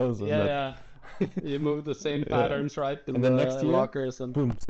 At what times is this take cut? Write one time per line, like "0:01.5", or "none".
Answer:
0:03.1